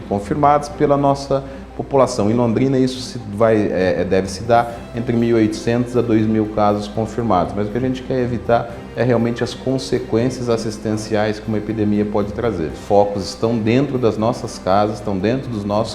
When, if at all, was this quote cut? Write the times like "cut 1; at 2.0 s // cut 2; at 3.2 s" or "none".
cut 1; at 12.8 s

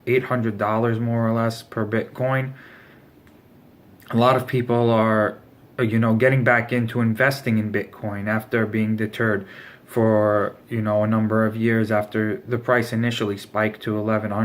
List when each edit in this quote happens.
cut 1; at 10.3 s

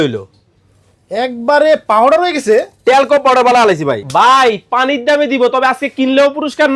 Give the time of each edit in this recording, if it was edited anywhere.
cut 1; at 4.0 s

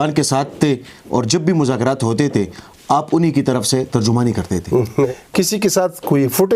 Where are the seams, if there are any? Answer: cut 1; at 5.1 s

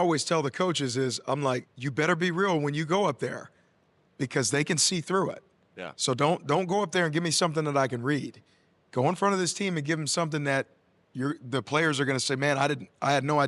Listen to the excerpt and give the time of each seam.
none

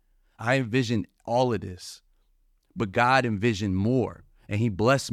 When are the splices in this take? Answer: none

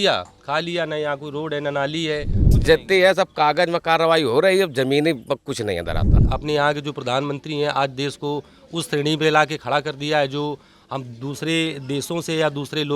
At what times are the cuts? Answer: cut 1; at 2.6 s // cut 2; at 6.1 s

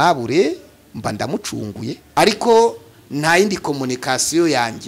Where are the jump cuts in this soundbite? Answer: cut 1; at 2.0 s

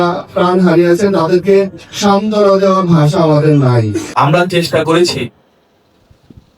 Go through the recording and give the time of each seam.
cut 1; at 4.0 s

